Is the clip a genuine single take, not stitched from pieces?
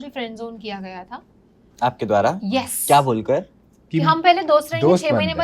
yes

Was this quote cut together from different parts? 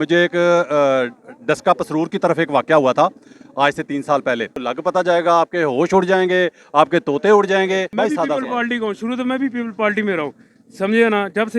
yes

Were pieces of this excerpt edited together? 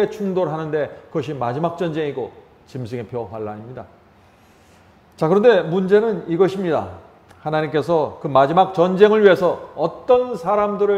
no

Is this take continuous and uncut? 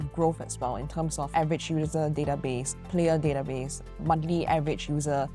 yes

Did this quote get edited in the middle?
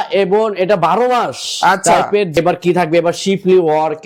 yes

